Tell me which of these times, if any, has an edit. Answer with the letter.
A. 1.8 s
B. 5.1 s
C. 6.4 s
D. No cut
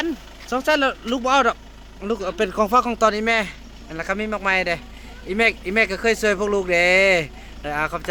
D